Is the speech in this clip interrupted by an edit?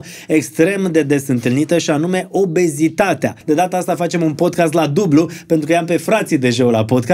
yes; 1 cut; at 3.3 s

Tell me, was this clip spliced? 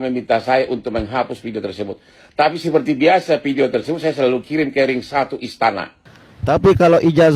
yes; 1 cut; at 6.2 s

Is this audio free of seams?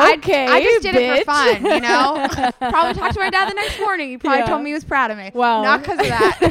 no; 1 cut; at 2.6 s

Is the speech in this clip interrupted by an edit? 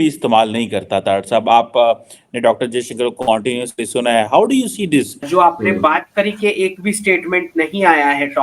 yes; 1 cut; at 5.3 s

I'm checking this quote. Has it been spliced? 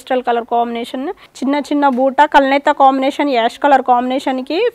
yes; 1 cut; at 1.2 s

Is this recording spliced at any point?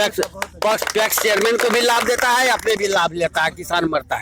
no; 0 cuts

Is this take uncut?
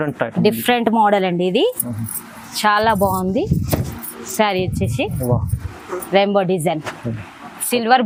yes; 0 cuts

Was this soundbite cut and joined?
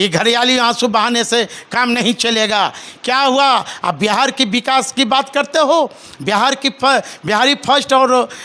no; 0 cuts

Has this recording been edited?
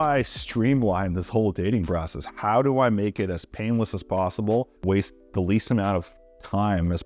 yes; 1 cut; at 4.7 s

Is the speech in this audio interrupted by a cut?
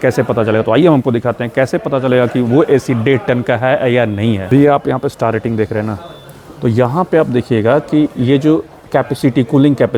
yes; 1 cut; at 4.4 s

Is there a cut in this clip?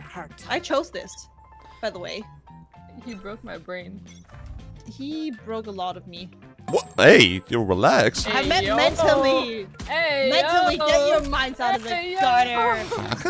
no; 0 cuts

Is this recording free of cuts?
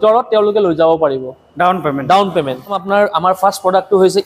no; 1 cut; at 2.7 s

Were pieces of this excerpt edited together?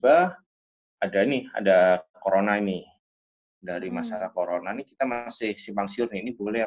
no; 0 cuts

